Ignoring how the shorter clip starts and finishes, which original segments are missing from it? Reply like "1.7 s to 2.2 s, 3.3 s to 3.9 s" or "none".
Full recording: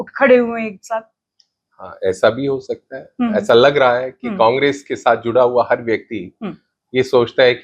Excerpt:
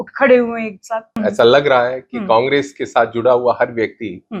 1.2 s to 3.3 s